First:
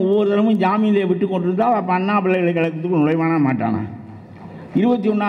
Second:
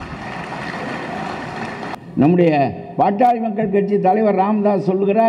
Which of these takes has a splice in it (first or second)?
second